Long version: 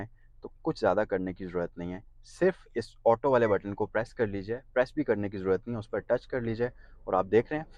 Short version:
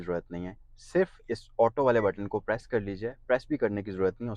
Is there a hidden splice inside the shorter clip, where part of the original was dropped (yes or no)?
no